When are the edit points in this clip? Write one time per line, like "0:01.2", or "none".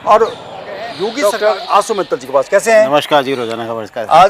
0:01.0